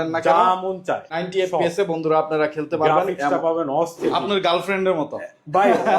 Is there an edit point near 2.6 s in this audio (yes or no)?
no